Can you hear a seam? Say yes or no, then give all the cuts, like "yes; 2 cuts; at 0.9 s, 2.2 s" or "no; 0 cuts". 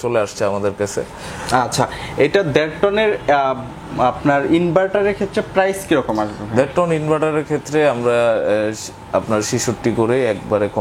no; 0 cuts